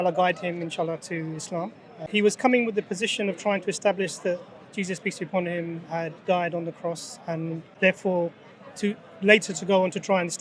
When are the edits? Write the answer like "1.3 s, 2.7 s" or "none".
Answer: 1.9 s, 7.6 s